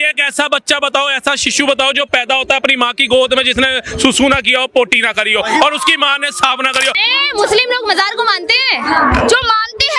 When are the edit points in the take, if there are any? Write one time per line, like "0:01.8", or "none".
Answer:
0:06.9